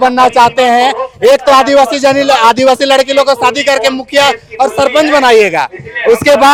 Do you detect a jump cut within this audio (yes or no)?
no